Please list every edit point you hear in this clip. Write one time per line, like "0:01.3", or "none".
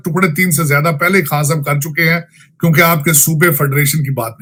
none